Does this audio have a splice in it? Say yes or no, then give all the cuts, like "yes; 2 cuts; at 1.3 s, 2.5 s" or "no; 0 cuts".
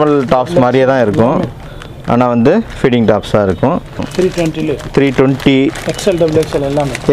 yes; 1 cut; at 4.1 s